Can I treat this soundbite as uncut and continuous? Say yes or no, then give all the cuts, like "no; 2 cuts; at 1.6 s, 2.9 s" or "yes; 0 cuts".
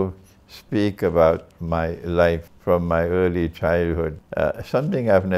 no; 2 cuts; at 2.5 s, 4.2 s